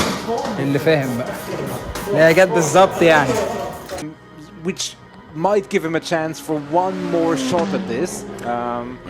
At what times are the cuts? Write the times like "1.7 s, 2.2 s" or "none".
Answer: 4.0 s